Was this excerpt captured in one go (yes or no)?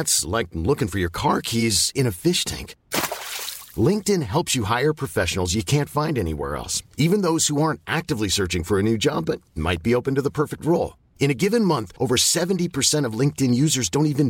yes